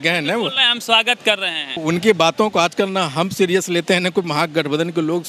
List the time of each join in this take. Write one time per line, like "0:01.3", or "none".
0:01.8